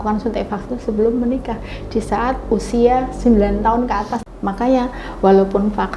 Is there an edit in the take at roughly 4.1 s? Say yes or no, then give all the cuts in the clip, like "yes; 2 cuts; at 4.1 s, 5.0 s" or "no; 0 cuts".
yes; 1 cut; at 4.1 s